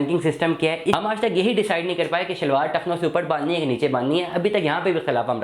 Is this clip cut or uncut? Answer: cut